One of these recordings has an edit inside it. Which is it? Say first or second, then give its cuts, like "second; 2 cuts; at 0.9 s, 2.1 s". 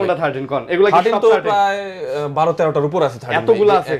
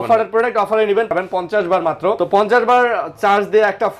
second; 2 cuts; at 1.1 s, 2.2 s